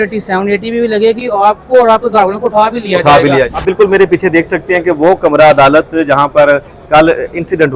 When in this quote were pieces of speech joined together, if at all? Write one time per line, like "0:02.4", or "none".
0:03.5